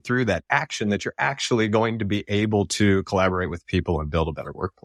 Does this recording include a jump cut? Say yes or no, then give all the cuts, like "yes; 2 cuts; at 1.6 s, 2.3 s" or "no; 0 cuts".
no; 0 cuts